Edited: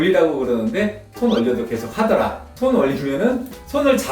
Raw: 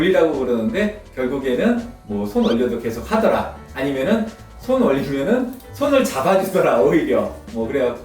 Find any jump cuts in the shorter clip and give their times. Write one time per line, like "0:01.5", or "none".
0:01.1
0:02.4

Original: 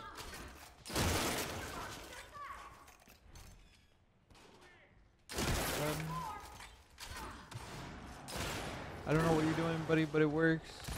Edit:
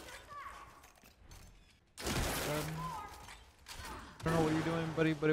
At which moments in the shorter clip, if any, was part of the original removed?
0:01.8
0:04.3

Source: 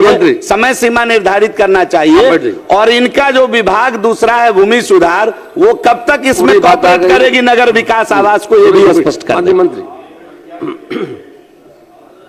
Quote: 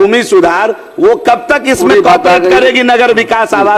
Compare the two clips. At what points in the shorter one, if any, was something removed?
none

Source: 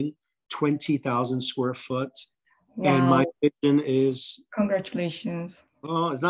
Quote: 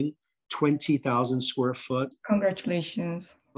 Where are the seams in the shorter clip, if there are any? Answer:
0:02.1

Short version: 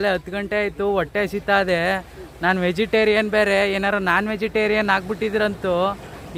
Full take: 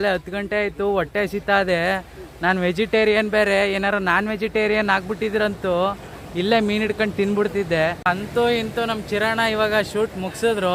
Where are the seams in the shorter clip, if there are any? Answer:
none

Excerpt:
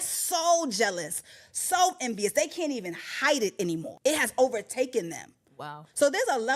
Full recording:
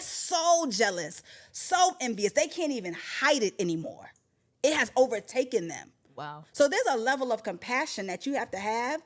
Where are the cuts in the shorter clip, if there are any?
0:03.9

